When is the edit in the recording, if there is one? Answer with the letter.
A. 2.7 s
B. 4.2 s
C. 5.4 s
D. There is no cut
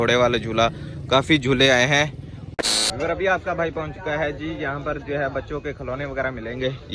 A